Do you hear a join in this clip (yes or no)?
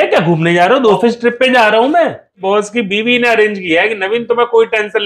yes